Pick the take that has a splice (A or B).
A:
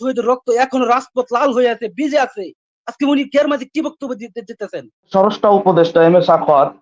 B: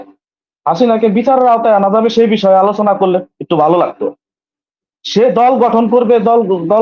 A